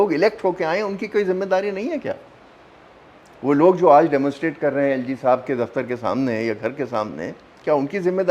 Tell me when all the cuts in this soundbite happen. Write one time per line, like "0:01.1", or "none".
none